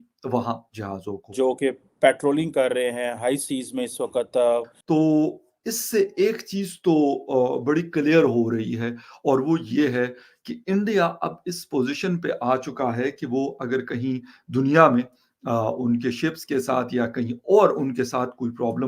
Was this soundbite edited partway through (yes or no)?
yes